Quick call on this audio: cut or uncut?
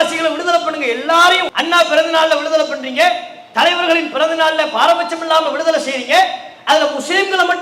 cut